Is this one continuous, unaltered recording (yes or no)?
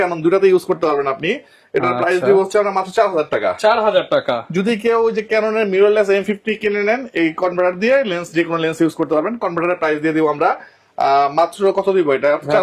yes